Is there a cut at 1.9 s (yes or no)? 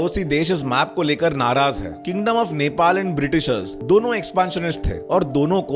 yes